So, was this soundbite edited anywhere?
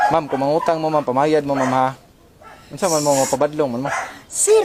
no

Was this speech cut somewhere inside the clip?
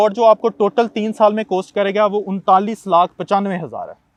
no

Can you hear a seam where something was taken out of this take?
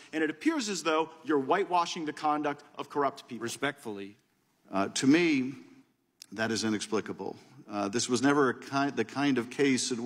yes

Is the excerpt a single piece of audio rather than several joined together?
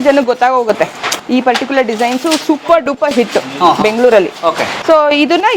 yes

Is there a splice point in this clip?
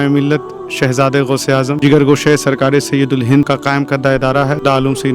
yes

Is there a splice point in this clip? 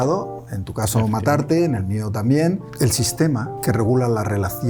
yes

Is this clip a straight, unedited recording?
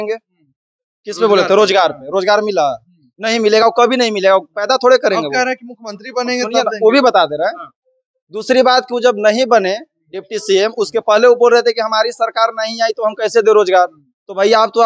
yes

